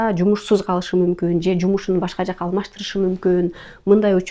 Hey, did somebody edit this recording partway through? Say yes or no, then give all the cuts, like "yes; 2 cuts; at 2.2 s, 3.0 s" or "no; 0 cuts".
no; 0 cuts